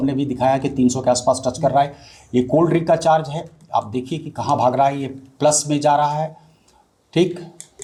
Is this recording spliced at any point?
no; 0 cuts

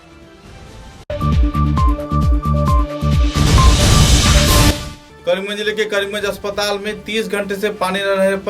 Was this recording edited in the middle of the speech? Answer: yes; 2 cuts; at 1.0 s, 4.6 s

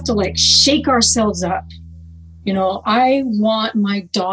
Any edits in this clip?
no; 0 cuts

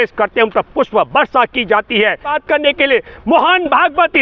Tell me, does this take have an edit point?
yes; 1 cut; at 2.4 s

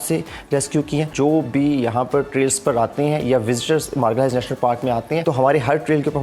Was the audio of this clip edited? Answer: yes; 2 cuts; at 1.1 s, 5.2 s

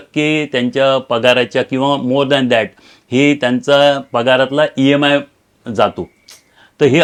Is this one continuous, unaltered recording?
yes; 0 cuts

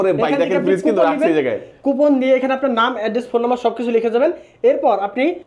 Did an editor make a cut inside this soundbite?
no; 0 cuts

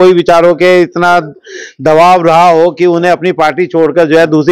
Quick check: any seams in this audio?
no; 0 cuts

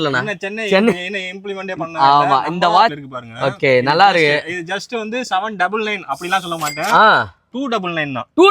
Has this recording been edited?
yes; 1 cut; at 2.9 s

